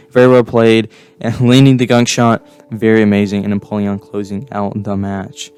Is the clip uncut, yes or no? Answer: yes